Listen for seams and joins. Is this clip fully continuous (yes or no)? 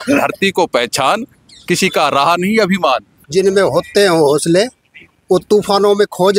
no